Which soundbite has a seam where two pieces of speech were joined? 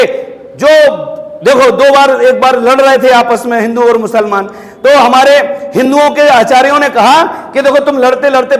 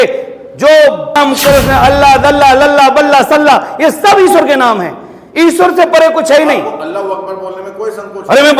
second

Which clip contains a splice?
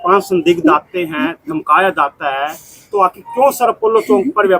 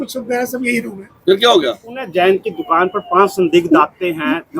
second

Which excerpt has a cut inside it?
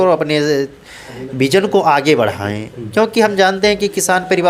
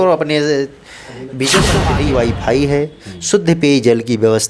second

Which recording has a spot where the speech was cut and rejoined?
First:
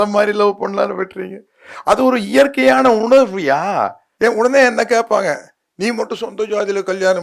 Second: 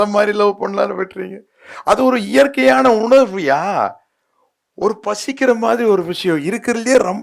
first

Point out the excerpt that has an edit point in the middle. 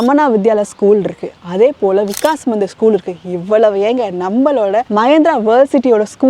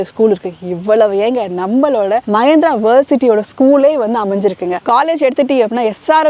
second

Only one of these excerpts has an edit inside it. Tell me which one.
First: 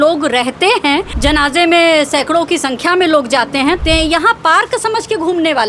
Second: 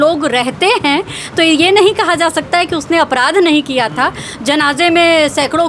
first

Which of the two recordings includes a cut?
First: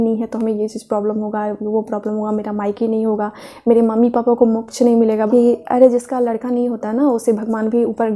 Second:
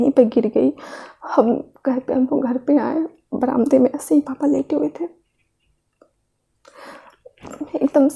first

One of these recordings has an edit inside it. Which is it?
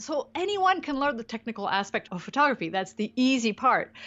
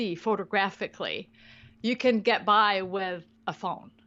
first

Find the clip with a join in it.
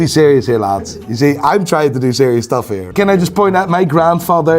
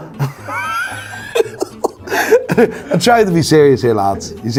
first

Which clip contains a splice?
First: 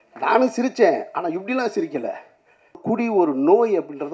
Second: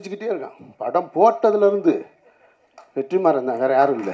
first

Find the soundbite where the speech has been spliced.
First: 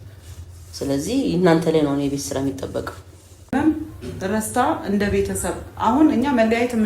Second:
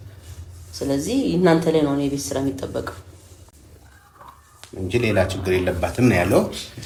first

